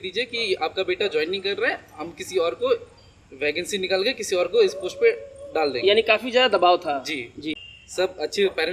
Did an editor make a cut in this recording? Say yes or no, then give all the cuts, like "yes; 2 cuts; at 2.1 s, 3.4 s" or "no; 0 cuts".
yes; 1 cut; at 7.5 s